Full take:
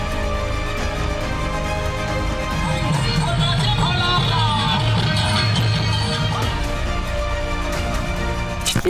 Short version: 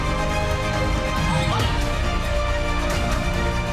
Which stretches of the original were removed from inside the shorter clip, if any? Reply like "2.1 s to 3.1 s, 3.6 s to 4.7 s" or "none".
2.9 s to 6.3 s